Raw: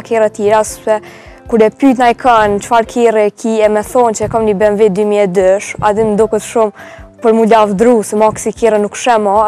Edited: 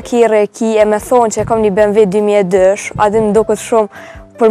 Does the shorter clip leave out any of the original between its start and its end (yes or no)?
no